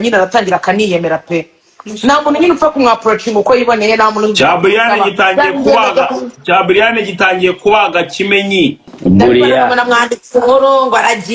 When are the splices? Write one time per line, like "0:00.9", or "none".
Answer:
0:08.9